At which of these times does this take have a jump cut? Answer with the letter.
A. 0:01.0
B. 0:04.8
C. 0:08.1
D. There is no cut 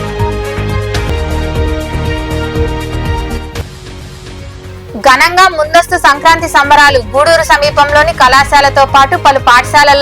A